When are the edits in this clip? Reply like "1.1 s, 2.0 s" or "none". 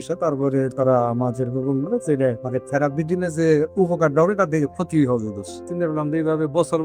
2.4 s, 5.6 s